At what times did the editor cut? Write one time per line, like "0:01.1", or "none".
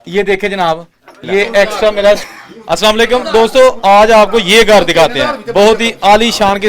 0:02.2